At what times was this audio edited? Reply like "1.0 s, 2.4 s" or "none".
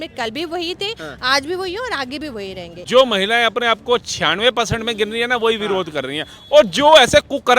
2.9 s

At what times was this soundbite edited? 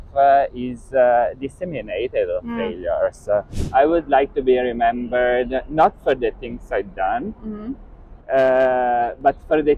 3.7 s

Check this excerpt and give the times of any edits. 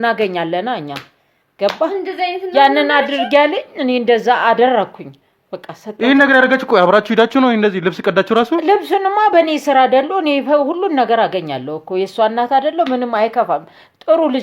none

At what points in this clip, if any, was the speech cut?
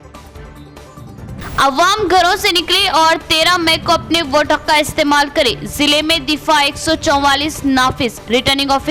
none

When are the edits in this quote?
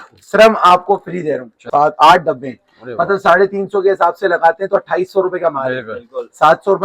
1.5 s

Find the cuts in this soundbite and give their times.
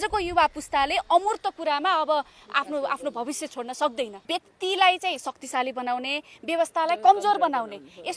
4.2 s

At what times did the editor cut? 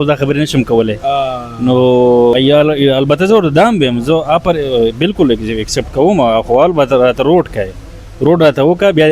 2.3 s

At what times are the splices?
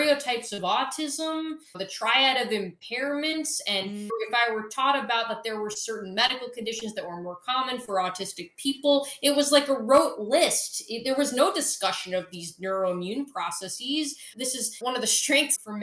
1.6 s, 4.1 s, 14.3 s

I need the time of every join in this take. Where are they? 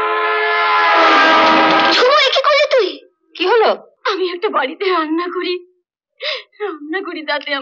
3.9 s

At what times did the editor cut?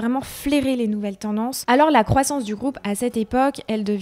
1.6 s

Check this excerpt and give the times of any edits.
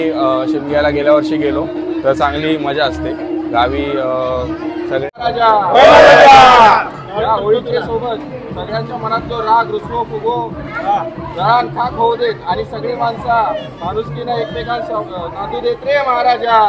5.2 s

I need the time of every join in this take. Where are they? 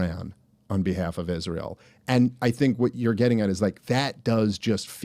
none

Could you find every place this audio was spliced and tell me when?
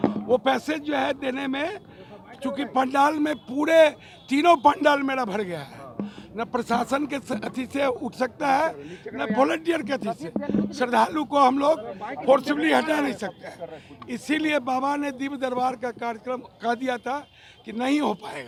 none

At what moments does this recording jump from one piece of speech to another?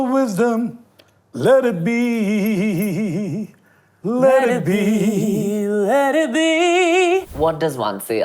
7.3 s

